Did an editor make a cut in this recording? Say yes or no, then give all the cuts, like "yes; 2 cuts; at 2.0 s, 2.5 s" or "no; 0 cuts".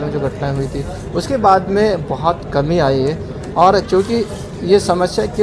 no; 0 cuts